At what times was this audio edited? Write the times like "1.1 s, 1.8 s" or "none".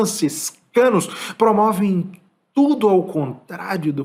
none